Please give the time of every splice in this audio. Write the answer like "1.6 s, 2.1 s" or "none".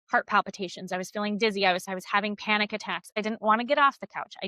1.9 s, 3.2 s